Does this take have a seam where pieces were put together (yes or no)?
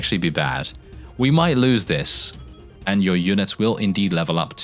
yes